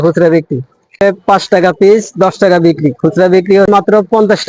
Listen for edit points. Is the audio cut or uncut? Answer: cut